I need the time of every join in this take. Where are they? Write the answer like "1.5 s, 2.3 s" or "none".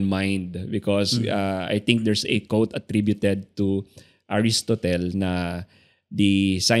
none